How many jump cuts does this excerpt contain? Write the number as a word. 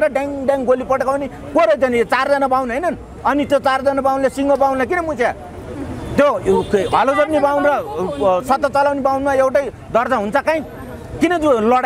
zero